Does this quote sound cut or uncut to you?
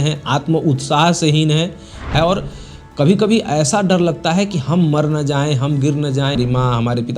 cut